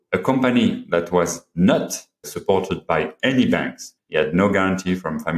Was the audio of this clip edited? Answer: yes; 1 cut; at 3.9 s

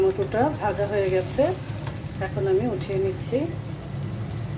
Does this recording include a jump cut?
no; 0 cuts

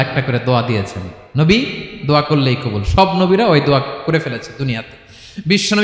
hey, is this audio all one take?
yes; 0 cuts

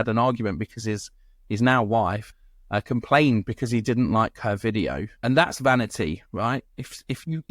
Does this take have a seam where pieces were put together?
yes; 2 cuts; at 2.3 s, 5.1 s

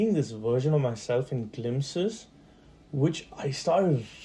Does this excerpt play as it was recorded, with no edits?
yes; 0 cuts

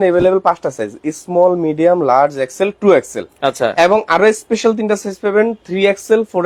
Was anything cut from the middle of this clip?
no; 0 cuts

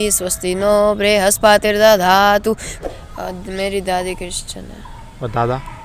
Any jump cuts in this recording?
yes; 1 cut; at 2.7 s

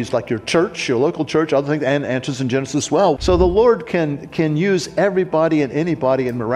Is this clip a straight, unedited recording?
no; 1 cut; at 3.2 s

